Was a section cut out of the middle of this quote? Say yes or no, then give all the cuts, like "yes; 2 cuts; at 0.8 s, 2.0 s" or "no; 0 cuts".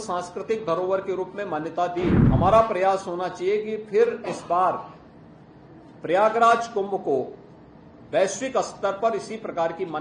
yes; 1 cut; at 2.2 s